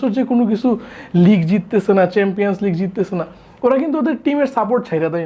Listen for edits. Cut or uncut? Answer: uncut